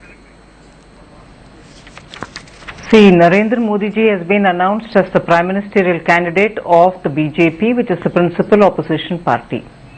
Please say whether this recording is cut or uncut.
cut